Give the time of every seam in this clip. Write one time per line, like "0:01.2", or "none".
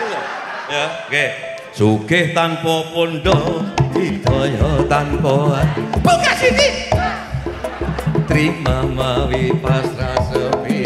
none